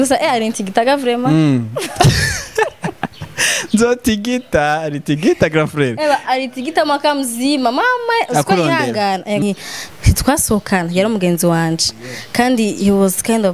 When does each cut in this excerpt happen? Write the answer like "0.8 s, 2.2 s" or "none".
9.4 s